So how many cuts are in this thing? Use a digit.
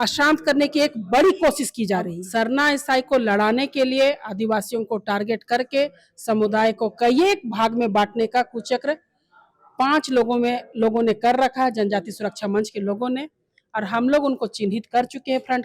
1